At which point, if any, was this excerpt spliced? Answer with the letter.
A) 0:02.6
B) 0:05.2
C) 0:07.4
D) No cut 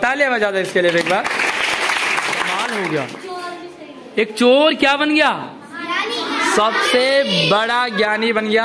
A